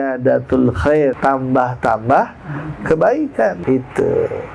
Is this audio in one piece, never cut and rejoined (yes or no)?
no